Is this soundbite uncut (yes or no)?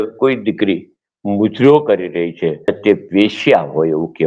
no